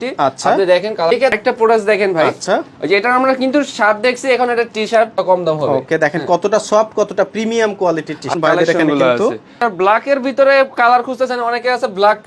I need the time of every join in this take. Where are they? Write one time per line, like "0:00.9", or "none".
0:01.1
0:05.2
0:08.3